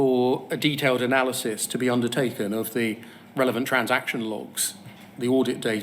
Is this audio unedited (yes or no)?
yes